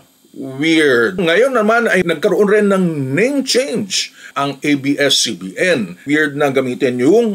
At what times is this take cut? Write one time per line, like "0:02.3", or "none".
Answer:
0:01.1
0:02.0
0:06.0